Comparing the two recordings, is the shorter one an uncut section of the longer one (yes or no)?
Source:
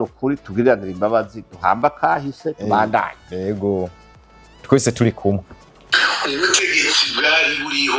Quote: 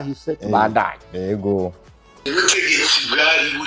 no